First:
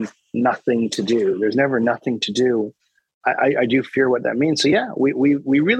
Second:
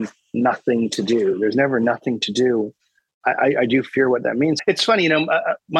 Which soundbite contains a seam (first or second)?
second